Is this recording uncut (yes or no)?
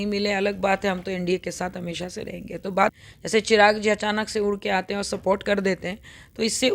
no